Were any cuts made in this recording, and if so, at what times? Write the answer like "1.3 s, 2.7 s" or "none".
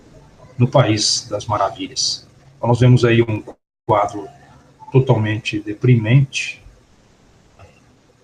1.2 s